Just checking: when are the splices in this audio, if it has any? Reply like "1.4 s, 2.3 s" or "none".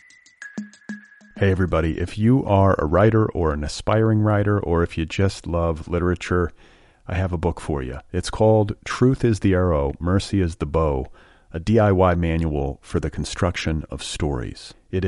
0.9 s